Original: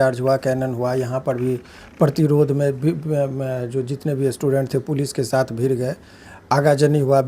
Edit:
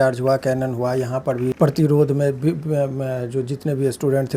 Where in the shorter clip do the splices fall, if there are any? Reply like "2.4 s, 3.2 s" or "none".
1.5 s